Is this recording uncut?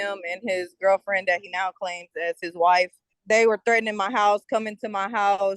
no; 1 cut; at 3.1 s

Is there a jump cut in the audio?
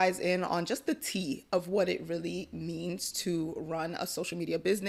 no; 0 cuts

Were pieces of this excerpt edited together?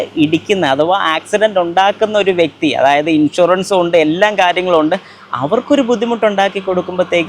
no; 0 cuts

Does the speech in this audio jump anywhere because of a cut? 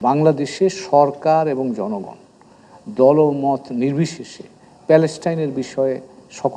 no; 0 cuts

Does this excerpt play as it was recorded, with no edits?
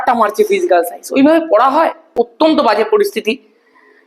no; 1 cut; at 2.3 s

